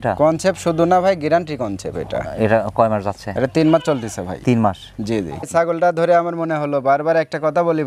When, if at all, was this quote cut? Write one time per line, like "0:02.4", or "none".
0:05.3